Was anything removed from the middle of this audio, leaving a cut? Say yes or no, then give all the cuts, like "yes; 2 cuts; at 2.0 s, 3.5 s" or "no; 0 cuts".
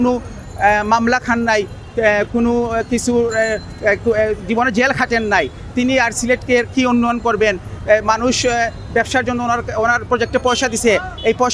no; 0 cuts